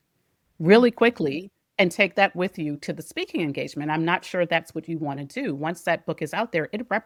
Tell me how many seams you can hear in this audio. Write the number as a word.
zero